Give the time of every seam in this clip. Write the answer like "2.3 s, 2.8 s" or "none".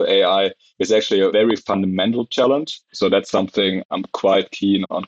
1.3 s, 2.8 s